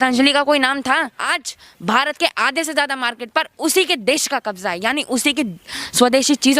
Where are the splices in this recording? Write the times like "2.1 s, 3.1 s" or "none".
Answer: 1.2 s